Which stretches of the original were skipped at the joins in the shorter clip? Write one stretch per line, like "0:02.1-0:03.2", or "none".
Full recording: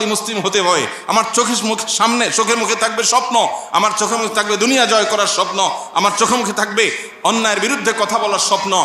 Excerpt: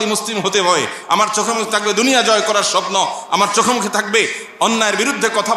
0:01.0-0:03.6